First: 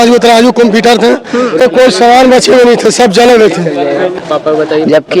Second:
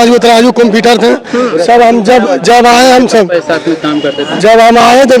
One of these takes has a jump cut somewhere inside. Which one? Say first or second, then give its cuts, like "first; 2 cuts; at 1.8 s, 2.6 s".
first; 2 cuts; at 1.6 s, 4.2 s